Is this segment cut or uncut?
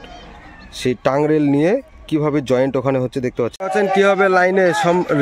cut